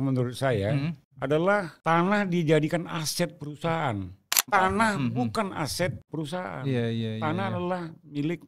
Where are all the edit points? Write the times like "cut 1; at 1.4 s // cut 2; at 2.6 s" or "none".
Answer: cut 1; at 1.1 s // cut 2; at 1.7 s // cut 3; at 4.5 s // cut 4; at 6.0 s